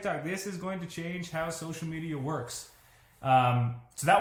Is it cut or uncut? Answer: uncut